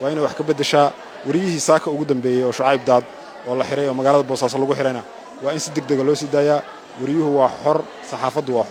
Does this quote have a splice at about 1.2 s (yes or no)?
no